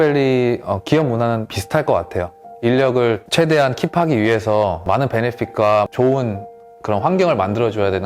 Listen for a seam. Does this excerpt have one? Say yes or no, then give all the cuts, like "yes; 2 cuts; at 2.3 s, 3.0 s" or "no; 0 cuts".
yes; 3 cuts; at 1.6 s, 3.2 s, 4.8 s